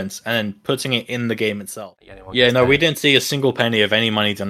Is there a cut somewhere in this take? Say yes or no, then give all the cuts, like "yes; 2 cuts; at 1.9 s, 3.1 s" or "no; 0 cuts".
yes; 1 cut; at 1.7 s